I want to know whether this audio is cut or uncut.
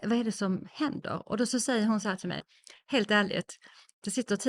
cut